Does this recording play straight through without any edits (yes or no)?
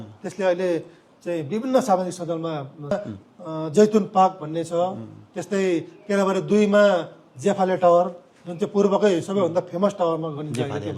no